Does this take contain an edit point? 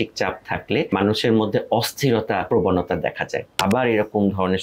yes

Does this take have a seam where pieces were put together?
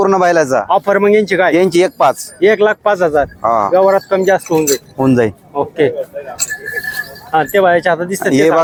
no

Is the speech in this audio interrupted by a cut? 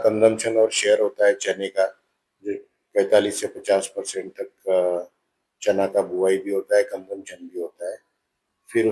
no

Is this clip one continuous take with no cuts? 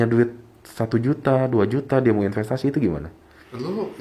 yes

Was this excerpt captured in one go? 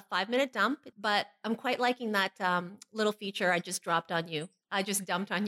no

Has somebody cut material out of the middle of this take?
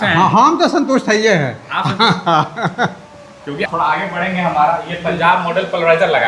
yes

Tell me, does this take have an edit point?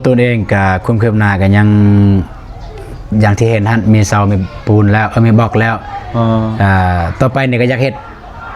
no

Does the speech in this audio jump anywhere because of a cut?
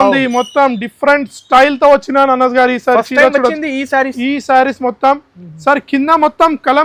no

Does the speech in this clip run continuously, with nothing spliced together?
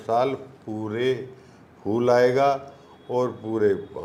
yes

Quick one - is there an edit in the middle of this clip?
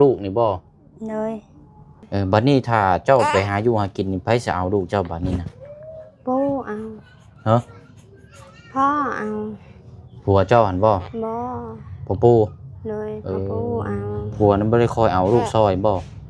yes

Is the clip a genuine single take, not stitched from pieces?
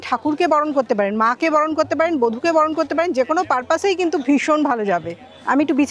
yes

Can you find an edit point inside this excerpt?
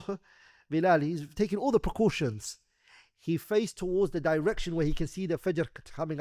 no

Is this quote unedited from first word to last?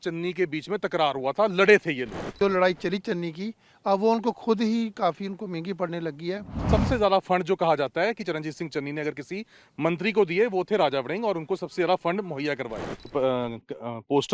no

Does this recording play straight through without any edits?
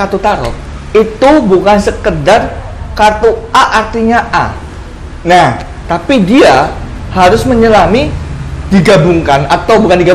yes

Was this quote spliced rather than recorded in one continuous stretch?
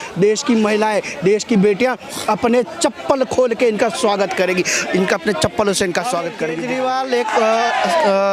yes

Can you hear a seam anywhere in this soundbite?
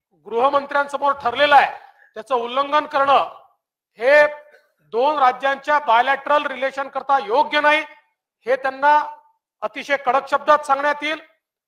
no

